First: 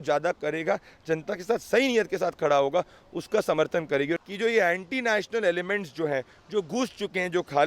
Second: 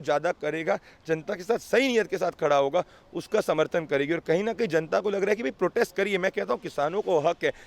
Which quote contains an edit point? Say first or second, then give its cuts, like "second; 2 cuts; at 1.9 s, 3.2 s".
first; 1 cut; at 4.2 s